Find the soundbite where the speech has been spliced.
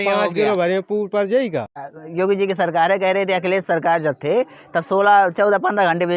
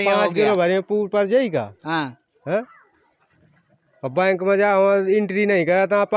first; 1 cut; at 1.9 s

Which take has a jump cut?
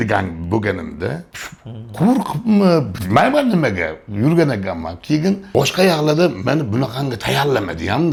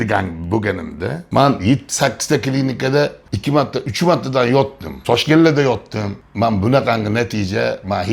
second; 2 cuts; at 1.2 s, 4.9 s

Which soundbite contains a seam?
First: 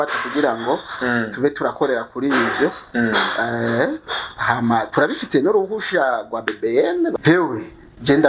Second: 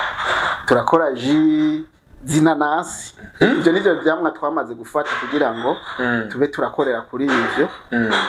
first; 1 cut; at 7.1 s

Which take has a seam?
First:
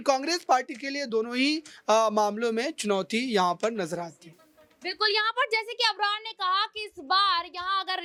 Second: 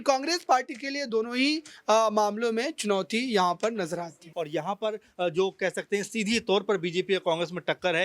second; 1 cut; at 4.2 s

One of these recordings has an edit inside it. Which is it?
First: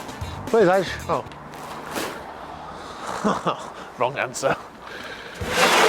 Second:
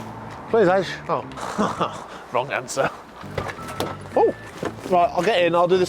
second; 3 cuts; at 1.3 s, 3.2 s, 4.5 s

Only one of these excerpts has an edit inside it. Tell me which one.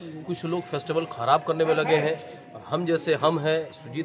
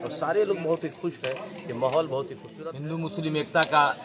second; 1 cut; at 2.4 s

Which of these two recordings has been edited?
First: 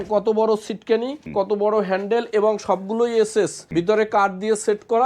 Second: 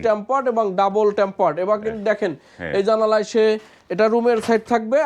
first; 2 cuts; at 1.2 s, 3.6 s

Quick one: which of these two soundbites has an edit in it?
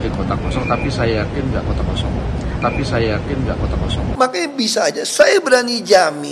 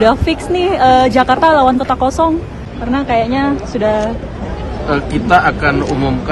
first; 1 cut; at 4.1 s

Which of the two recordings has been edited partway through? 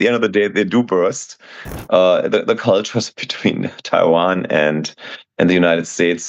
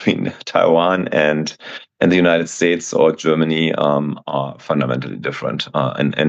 first; 1 cut; at 1.6 s

